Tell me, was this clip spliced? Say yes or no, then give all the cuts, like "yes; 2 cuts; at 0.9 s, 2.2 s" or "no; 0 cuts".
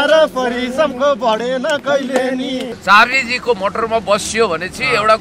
yes; 1 cut; at 2.7 s